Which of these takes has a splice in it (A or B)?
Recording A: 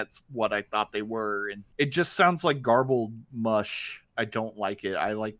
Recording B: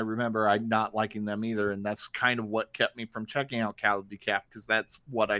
A